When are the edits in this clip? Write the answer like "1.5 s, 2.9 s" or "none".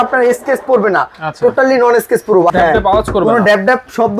2.5 s